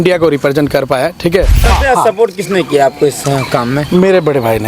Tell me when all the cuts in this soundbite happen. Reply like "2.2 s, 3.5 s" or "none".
1.7 s

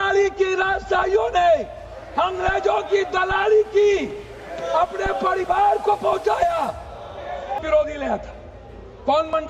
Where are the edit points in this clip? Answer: 7.6 s

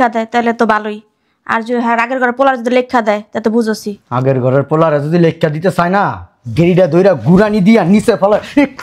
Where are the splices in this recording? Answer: 4.0 s

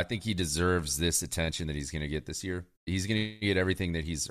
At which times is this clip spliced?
2.9 s

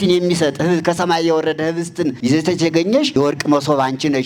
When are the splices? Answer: 2.2 s, 3.1 s

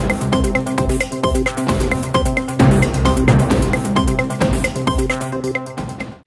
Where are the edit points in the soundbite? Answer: none

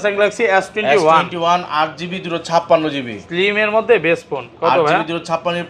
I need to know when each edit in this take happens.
none

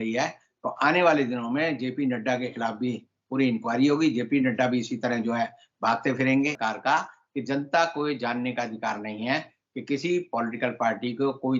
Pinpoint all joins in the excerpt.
6.6 s

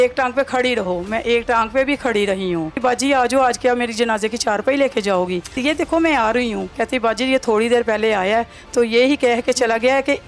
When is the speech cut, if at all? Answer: 2.8 s, 5.6 s, 6.7 s

